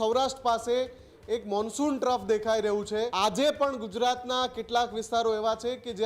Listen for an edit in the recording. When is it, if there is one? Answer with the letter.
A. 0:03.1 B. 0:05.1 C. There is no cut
A